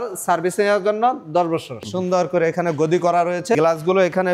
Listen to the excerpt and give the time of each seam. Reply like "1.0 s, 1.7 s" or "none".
1.9 s, 3.6 s